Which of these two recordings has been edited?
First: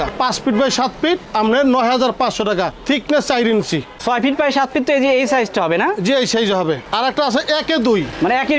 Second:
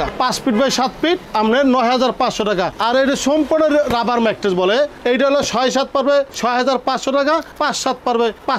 second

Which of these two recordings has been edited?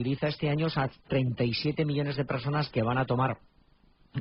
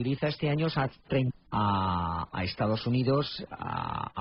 first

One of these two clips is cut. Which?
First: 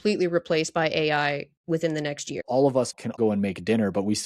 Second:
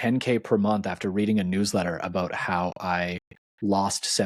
first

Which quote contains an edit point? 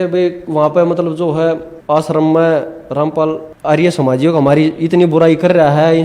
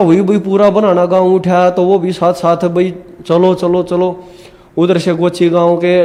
first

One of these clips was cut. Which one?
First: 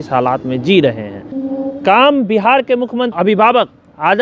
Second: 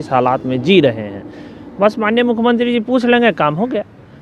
first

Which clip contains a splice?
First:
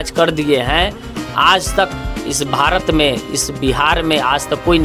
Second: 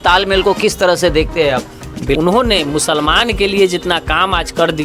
second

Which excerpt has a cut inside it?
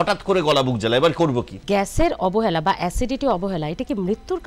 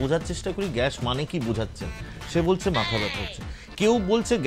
first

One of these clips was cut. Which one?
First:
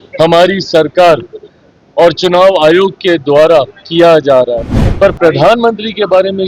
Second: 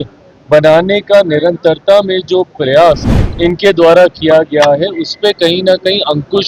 first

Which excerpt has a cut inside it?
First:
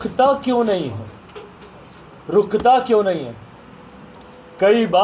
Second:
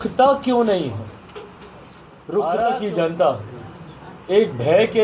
second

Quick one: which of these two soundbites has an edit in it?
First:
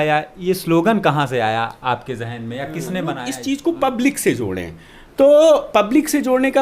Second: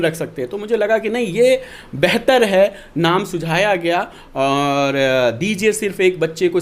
first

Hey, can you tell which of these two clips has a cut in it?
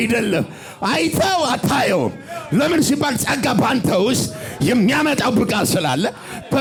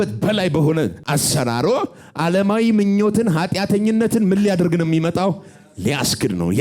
second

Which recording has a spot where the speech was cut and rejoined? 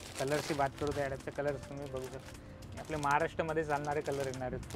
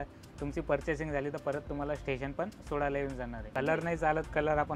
second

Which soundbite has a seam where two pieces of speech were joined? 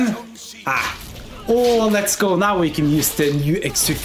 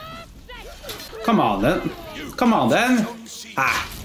second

